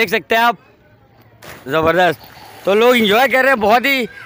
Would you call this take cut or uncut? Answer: uncut